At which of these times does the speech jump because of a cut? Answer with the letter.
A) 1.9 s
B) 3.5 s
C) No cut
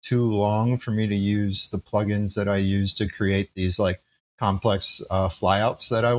C